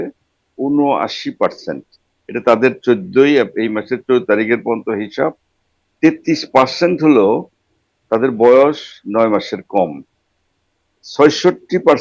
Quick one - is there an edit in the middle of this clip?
no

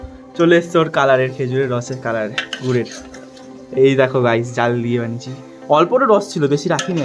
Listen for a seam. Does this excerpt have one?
no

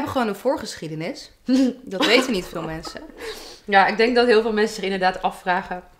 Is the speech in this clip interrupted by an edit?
no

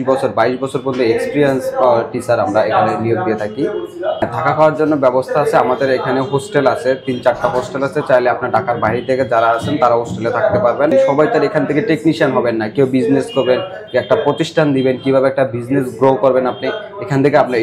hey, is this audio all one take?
no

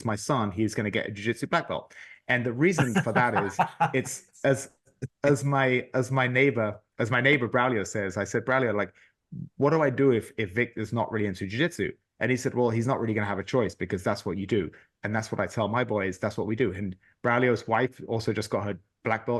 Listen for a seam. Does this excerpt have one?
no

